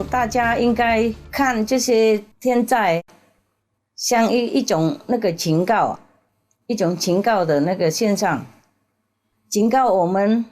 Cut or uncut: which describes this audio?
cut